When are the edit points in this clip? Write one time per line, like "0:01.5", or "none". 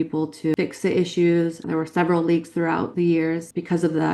0:01.6